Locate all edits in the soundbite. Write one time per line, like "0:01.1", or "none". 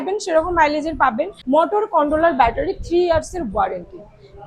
0:01.3